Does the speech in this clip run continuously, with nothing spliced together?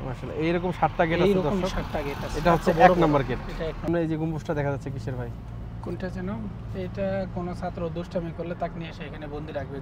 no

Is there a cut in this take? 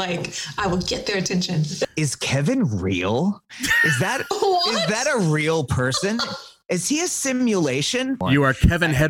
yes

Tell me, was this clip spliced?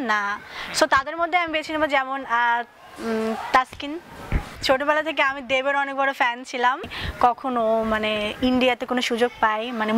yes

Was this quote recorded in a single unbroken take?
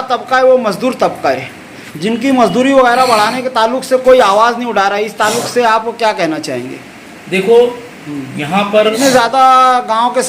no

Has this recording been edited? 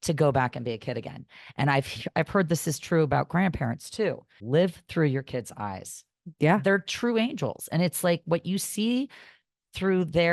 yes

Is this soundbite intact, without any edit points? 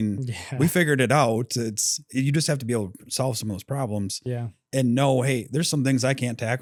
yes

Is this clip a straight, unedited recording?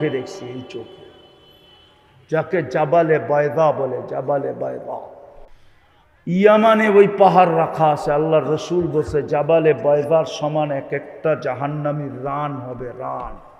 yes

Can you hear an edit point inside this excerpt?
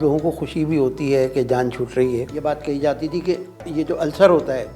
yes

